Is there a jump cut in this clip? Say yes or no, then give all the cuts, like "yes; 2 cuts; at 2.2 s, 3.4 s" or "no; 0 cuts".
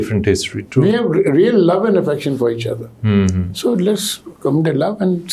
no; 0 cuts